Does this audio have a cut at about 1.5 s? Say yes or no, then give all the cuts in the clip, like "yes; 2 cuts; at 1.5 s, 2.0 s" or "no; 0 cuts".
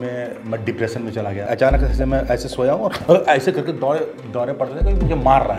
yes; 1 cut; at 1.5 s